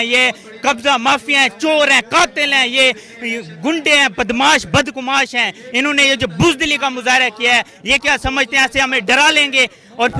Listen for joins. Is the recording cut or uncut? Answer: uncut